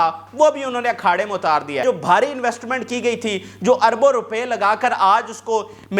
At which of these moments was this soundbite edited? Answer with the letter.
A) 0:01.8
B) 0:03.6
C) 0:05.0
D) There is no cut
A